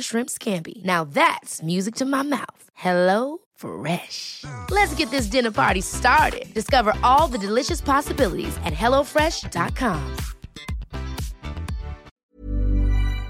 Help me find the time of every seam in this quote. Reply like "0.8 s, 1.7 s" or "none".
12.1 s